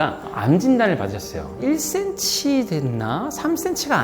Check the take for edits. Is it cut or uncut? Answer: cut